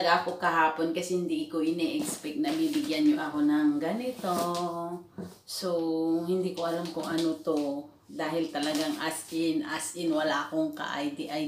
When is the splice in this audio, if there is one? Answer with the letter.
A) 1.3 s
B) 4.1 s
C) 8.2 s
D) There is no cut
D